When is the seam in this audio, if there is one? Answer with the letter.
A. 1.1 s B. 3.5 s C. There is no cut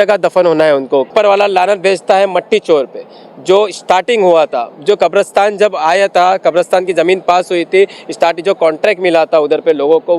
A